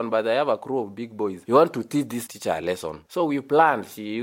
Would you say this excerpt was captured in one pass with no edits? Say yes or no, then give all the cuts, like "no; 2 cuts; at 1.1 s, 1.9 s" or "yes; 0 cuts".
no; 2 cuts; at 1.4 s, 2.2 s